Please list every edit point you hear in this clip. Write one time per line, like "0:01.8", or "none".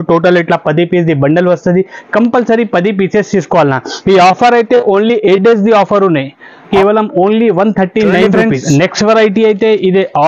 0:06.7
0:08.3

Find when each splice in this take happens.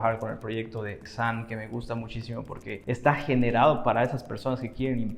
0:01.1
0:02.8

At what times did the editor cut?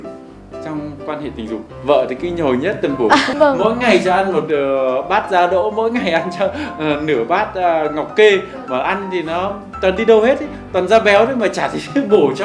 0:01.7
0:03.3

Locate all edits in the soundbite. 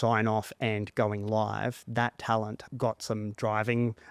0:02.6

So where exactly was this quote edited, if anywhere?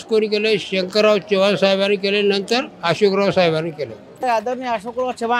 0:04.1

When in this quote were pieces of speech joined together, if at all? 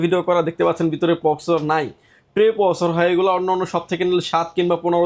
none

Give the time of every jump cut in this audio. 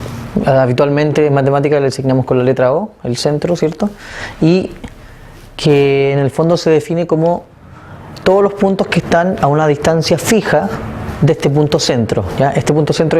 0:01.4

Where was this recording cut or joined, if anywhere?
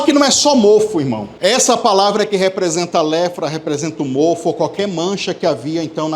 0:01.3

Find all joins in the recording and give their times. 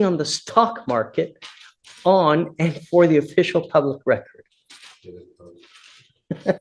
none

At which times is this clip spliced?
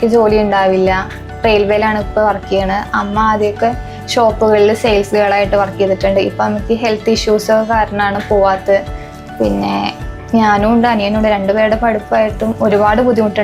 none

